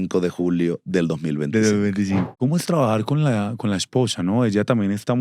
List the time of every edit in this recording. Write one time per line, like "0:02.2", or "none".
0:02.3